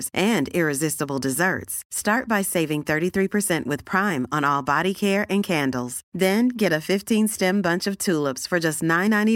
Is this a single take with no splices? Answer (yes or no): yes